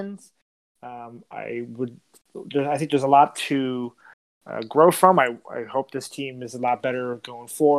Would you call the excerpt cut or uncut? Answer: uncut